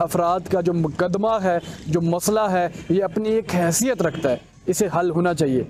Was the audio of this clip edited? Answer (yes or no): no